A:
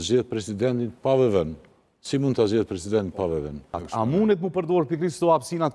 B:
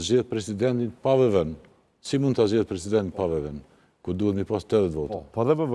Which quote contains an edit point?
A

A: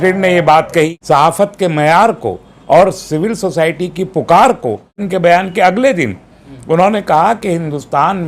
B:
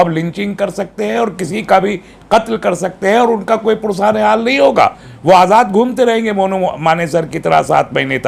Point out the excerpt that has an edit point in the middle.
A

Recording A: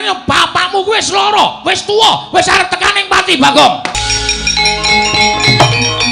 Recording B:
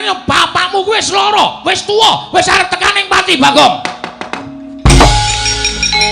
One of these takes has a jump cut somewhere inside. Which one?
A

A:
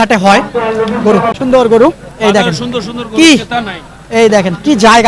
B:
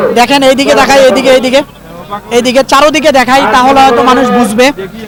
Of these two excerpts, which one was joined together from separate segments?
A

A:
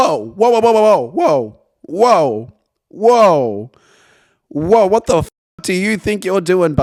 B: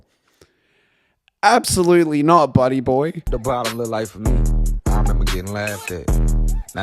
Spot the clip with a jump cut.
B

